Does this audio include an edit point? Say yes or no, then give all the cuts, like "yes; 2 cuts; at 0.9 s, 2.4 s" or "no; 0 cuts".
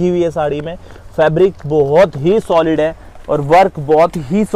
no; 0 cuts